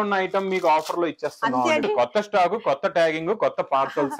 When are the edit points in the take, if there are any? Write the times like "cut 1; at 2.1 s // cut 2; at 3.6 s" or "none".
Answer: cut 1; at 1.8 s

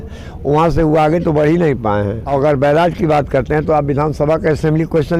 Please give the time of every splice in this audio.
cut 1; at 2.2 s

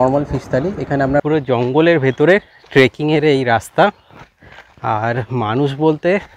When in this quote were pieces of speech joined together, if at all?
cut 1; at 1.2 s

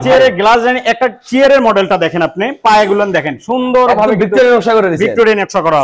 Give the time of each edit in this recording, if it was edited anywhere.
none

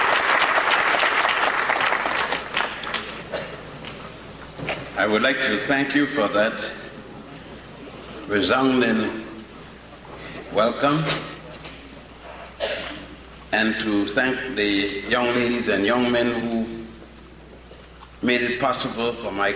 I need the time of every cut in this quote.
cut 1; at 1.0 s // cut 2; at 16.0 s

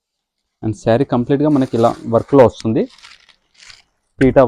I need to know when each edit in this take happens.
none

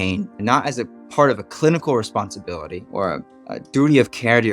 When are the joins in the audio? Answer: cut 1; at 2.9 s

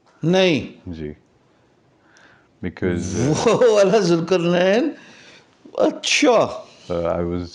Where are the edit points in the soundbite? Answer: none

